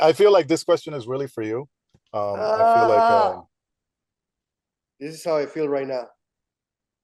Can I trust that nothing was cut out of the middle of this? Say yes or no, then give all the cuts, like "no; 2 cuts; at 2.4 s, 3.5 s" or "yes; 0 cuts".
yes; 0 cuts